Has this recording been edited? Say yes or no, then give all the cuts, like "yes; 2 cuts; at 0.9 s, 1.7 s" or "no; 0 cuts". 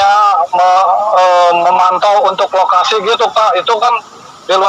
no; 0 cuts